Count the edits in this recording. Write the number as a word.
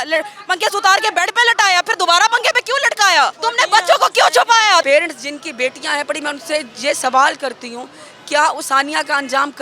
two